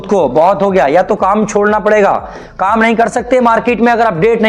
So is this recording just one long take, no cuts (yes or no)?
yes